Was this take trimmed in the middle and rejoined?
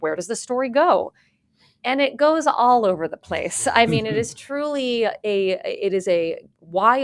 no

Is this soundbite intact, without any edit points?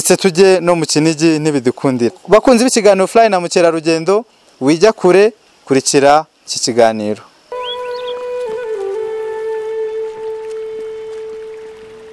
yes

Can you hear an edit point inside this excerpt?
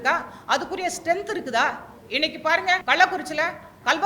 yes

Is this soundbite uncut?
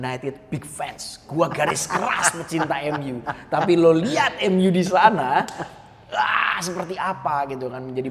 yes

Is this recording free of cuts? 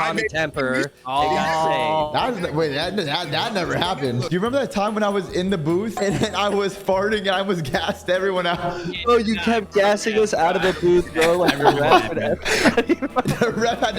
no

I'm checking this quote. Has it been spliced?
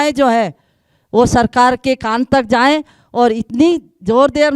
no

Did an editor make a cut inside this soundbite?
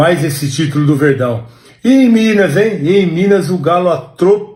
no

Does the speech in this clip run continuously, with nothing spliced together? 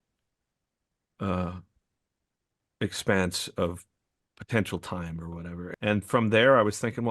no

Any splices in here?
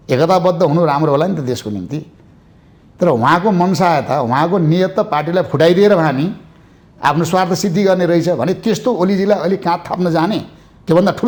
no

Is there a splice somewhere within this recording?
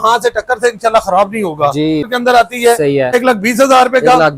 yes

